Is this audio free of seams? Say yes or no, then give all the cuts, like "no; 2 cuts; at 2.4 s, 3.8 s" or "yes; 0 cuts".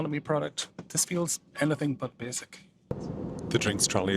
no; 1 cut; at 2.8 s